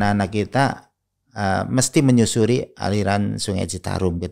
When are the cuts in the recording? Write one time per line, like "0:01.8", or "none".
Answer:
none